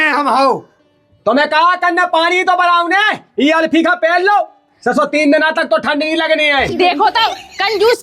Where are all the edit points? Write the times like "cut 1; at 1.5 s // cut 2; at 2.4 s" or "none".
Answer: none